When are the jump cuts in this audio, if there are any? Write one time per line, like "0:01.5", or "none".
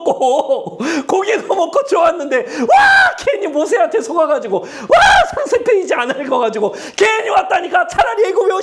none